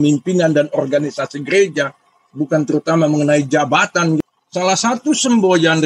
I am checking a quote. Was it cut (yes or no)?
yes